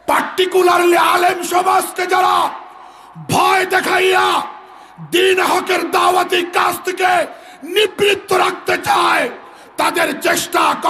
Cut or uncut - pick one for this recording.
uncut